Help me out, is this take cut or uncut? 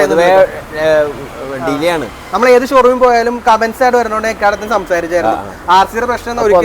uncut